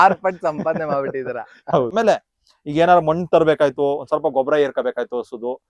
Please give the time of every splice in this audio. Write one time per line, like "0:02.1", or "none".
0:01.9